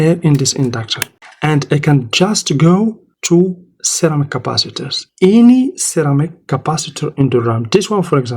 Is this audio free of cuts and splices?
no; 2 cuts; at 1.2 s, 3.1 s

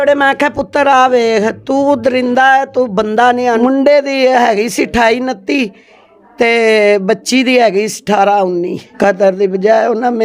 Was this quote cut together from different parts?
yes; 2 cuts; at 3.6 s, 8.8 s

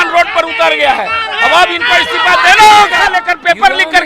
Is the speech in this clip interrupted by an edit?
yes; 1 cut; at 3.1 s

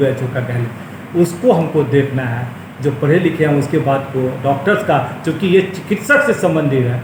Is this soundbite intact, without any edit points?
yes; 0 cuts

